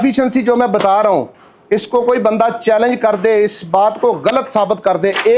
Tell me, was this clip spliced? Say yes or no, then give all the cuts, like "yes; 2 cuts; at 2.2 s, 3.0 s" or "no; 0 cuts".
no; 0 cuts